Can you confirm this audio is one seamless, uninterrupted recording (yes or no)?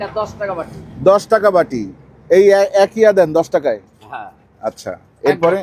yes